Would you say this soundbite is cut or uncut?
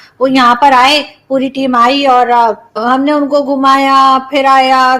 cut